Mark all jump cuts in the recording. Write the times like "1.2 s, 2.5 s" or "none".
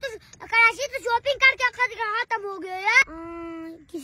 3.0 s